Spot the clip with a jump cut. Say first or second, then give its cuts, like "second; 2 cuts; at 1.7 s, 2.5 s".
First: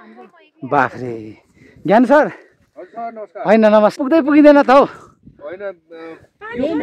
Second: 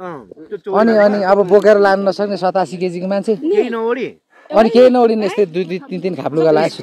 first; 1 cut; at 4.0 s